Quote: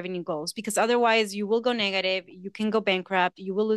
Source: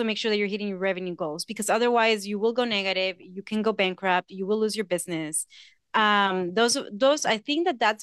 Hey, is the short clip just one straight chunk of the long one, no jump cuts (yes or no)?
yes